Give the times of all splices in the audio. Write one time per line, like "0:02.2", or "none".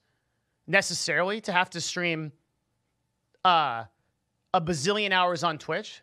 none